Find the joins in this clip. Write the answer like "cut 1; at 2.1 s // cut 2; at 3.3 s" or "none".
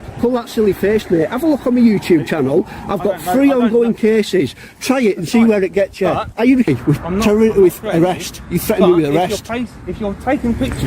cut 1; at 6.7 s